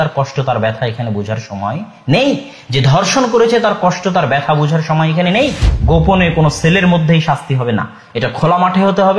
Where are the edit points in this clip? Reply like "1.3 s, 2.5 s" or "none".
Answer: 5.7 s